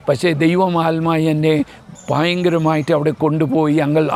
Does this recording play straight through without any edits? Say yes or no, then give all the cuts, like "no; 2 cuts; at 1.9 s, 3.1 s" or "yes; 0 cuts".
yes; 0 cuts